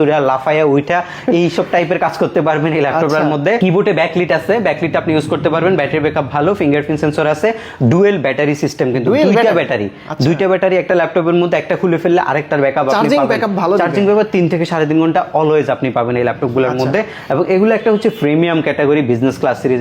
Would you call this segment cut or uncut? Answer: uncut